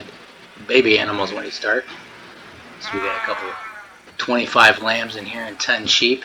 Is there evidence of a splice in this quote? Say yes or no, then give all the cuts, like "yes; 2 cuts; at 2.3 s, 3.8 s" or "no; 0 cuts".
no; 0 cuts